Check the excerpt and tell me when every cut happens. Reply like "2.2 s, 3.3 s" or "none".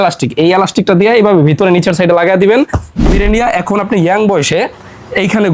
3.1 s